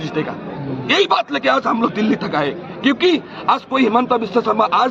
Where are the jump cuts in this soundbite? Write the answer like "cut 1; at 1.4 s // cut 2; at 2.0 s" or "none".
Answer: none